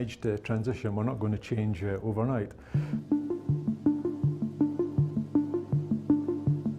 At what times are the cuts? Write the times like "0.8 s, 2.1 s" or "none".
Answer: 2.6 s